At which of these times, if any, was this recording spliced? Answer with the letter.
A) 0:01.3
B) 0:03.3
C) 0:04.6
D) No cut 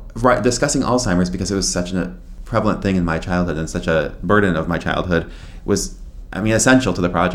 D